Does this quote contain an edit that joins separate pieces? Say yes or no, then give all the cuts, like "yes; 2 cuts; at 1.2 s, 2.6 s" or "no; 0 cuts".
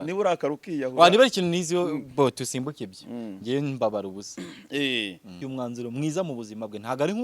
yes; 1 cut; at 5.4 s